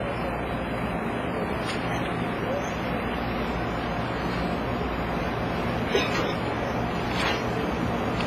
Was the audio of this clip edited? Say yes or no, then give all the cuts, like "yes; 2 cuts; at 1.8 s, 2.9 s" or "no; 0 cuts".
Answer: yes; 1 cut; at 1.5 s